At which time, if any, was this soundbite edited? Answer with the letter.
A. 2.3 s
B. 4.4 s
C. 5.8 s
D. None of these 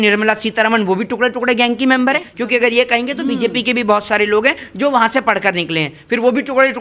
A